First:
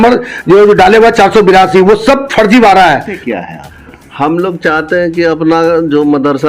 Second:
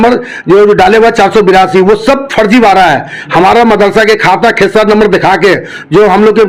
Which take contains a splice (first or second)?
first